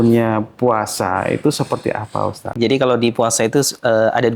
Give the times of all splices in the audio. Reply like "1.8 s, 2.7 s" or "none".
2.5 s